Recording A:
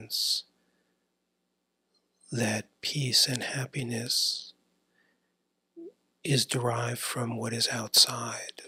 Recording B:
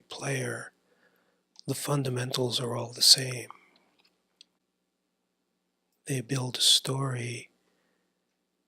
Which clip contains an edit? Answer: B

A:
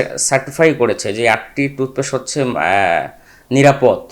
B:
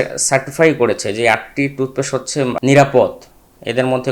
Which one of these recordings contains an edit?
B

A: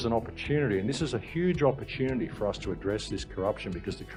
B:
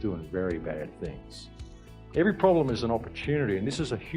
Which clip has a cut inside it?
B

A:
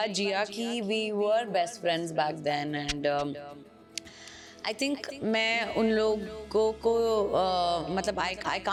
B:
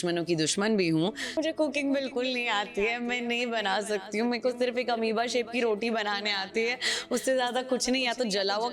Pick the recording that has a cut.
B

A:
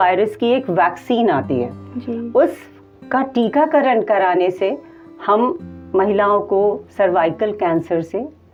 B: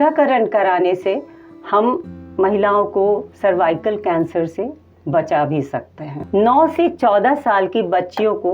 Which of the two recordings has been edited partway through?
B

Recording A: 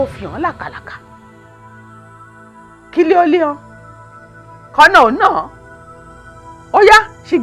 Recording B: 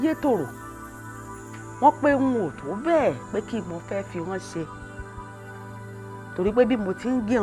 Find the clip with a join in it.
B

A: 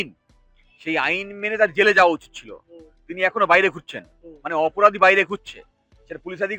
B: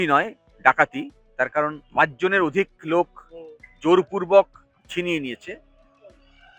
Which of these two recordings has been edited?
B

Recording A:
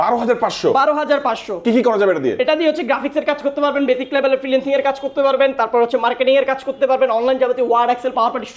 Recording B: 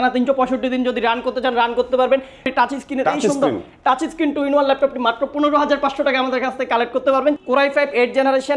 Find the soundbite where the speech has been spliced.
B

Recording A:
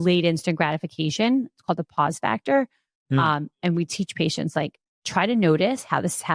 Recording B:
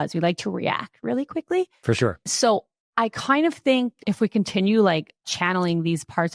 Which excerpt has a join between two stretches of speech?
B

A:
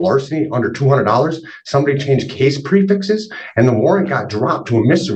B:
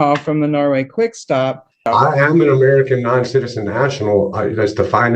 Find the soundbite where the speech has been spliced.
B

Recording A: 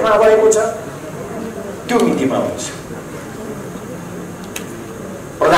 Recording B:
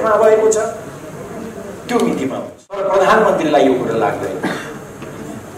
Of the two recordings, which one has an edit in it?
B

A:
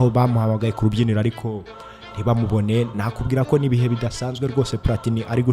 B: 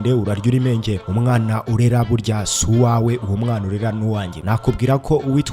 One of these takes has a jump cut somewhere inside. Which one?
B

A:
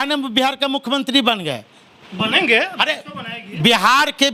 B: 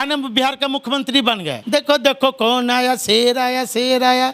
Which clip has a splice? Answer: B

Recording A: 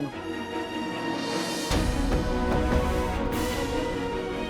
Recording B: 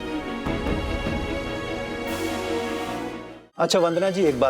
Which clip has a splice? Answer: B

